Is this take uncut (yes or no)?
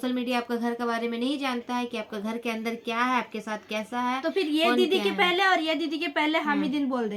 yes